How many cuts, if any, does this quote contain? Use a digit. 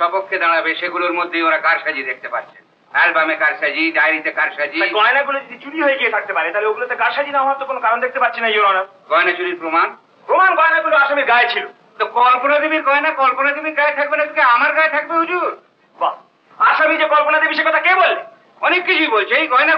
0